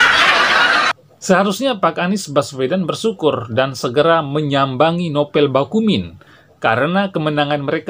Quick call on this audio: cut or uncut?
cut